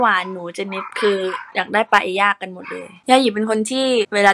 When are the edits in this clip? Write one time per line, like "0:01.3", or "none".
0:02.9